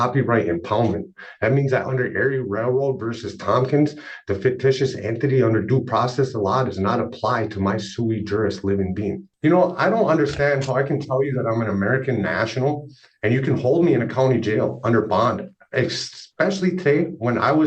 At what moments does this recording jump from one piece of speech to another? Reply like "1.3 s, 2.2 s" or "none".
9.0 s